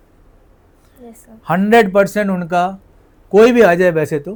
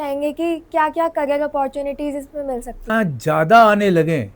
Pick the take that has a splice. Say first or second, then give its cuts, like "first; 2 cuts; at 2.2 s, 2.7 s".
second; 1 cut; at 2.9 s